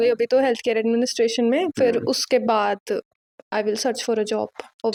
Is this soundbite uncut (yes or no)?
yes